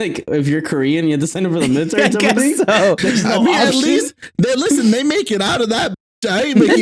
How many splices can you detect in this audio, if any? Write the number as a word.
zero